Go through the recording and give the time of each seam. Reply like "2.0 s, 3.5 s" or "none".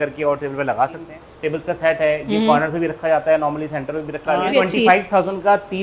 1.1 s, 4.5 s